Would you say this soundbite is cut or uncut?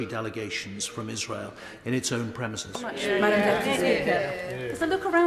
cut